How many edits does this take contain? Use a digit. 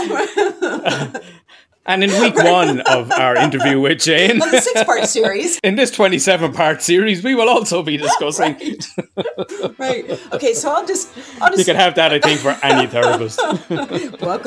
1